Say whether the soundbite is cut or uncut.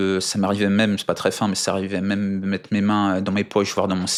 uncut